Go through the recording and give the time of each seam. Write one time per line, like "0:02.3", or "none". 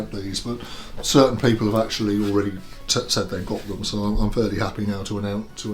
none